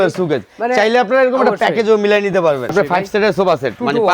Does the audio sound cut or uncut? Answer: cut